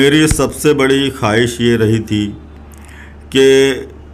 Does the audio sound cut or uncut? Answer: uncut